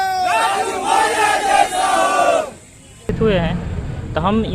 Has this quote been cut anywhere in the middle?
yes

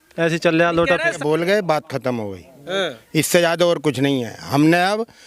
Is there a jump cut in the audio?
yes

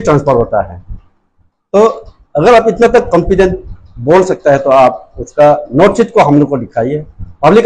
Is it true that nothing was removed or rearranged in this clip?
yes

